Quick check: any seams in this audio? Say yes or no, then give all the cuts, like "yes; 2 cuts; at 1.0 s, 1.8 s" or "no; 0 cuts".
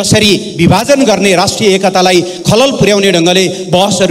no; 0 cuts